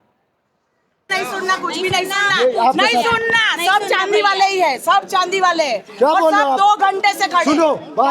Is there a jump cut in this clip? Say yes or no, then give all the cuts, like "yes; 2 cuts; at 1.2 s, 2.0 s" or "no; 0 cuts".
yes; 1 cut; at 1.1 s